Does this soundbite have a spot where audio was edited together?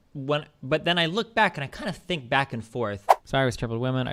yes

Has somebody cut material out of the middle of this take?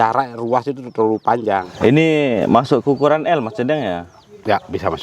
yes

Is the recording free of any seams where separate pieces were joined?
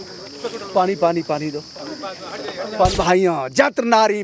no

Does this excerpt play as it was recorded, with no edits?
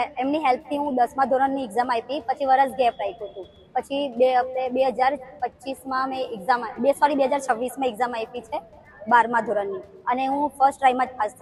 yes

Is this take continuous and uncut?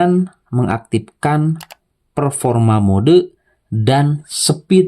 yes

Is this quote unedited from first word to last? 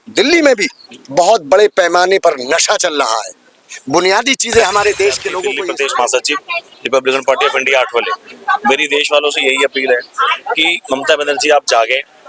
no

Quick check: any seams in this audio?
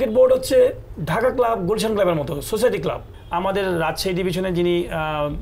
yes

